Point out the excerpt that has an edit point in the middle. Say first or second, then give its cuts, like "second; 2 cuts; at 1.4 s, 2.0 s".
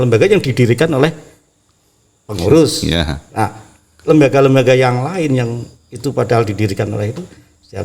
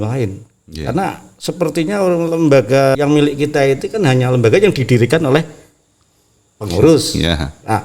second; 1 cut; at 2.9 s